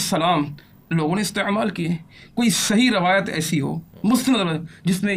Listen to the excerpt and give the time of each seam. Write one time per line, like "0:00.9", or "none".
none